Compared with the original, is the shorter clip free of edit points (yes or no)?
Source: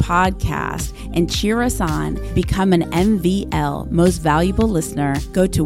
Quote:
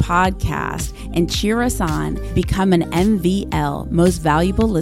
yes